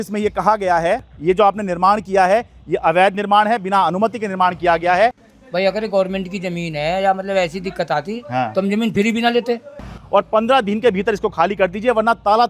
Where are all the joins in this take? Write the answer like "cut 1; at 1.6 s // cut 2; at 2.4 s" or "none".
cut 1; at 1.1 s // cut 2; at 5.3 s // cut 3; at 9.9 s

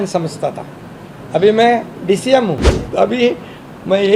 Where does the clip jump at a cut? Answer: cut 1; at 2.7 s

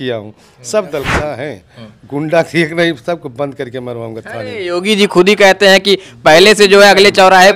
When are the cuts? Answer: cut 1; at 1.2 s

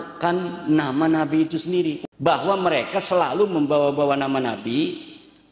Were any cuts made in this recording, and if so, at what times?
cut 1; at 2.0 s

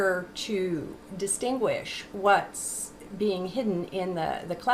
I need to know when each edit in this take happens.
cut 1; at 1.3 s

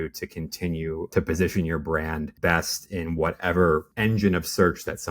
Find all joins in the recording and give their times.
cut 1; at 1.1 s // cut 2; at 2.3 s // cut 3; at 3.9 s

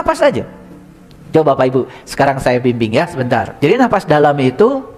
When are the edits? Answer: cut 1; at 3.5 s

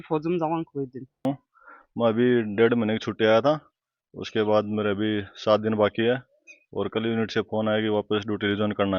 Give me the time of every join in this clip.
cut 1; at 1.2 s

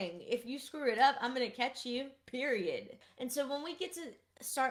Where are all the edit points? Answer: none

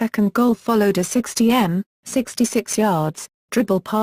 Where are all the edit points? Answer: cut 1; at 3.1 s

